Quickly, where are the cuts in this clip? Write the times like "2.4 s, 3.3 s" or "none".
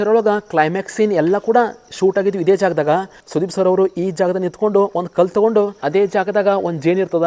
3.2 s, 5.8 s

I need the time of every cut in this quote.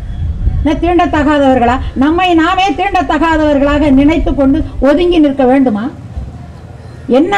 none

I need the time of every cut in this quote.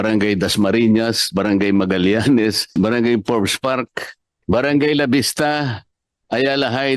2.8 s, 4.4 s

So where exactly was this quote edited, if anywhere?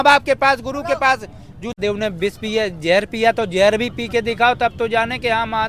1.8 s

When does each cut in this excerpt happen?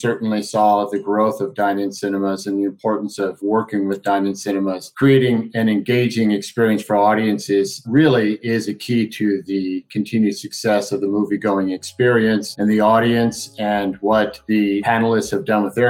3.4 s, 4.9 s

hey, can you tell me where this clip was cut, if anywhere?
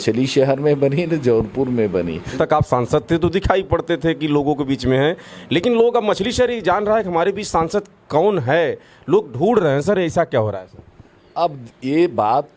2.3 s

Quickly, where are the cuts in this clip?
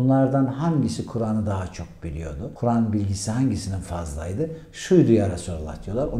none

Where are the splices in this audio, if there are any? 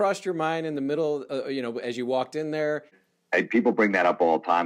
3.0 s

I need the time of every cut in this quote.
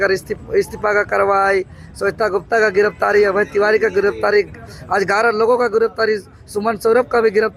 none

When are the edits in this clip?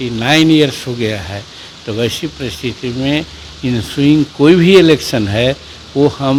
none

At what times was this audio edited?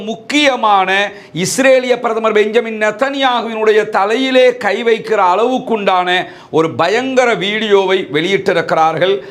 none

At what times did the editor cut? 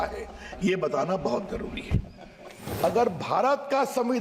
2.7 s

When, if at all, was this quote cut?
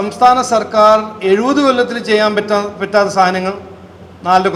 none

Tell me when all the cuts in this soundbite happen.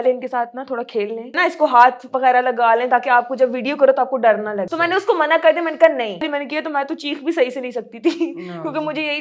1.3 s, 6.3 s

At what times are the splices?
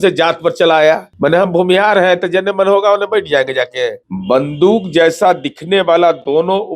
1.1 s, 4.1 s

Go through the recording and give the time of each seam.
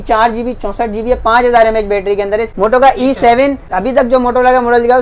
2.5 s, 3.7 s

